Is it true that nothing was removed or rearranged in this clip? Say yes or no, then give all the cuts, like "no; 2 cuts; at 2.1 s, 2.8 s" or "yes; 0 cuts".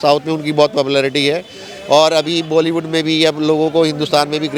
yes; 0 cuts